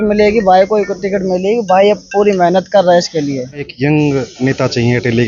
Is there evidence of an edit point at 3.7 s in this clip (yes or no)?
yes